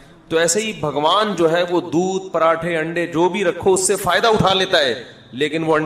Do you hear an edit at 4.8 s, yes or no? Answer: no